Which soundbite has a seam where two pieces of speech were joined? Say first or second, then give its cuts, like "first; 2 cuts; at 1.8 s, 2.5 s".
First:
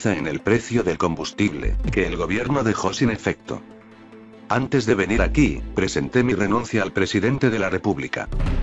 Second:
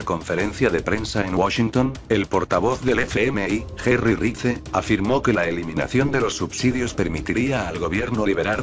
first; 1 cut; at 2.6 s